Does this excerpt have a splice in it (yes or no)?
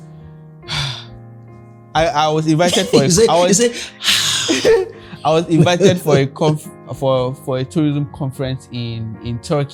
no